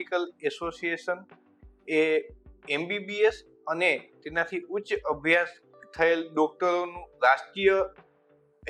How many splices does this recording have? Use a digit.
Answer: 0